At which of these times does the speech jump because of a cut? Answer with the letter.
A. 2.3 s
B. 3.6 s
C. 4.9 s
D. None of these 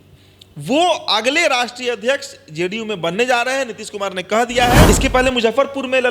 C